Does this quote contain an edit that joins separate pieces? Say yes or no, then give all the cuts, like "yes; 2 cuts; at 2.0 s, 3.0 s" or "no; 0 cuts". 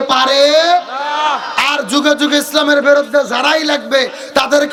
no; 0 cuts